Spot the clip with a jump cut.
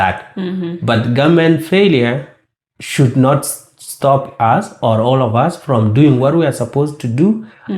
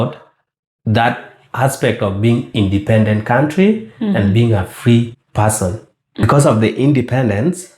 second; 1 cut; at 6.2 s

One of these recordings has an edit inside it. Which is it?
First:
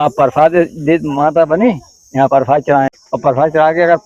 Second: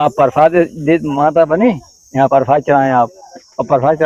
first; 1 cut; at 2.9 s

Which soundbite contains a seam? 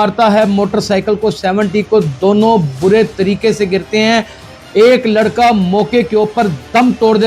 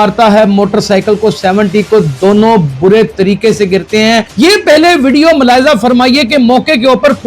second; 1 cut; at 4.3 s

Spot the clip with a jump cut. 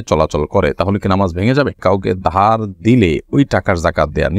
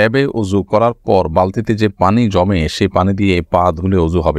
first; 1 cut; at 1.8 s

